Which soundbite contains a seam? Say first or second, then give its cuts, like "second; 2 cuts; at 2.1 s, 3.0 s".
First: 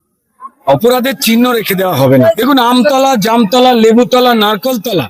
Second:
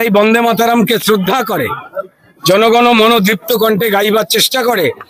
first; 1 cut; at 2.1 s